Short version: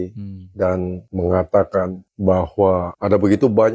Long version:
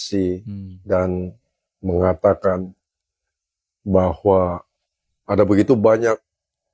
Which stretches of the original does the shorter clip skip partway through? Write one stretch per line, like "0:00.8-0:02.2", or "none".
0:01.3-0:01.7
0:02.7-0:03.7
0:04.6-0:05.2